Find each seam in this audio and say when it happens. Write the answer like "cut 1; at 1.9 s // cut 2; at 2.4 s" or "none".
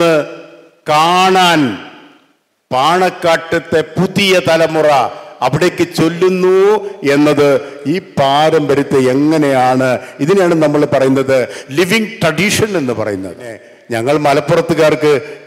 cut 1; at 13.7 s